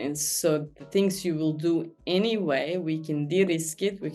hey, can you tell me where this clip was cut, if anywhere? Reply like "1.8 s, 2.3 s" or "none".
none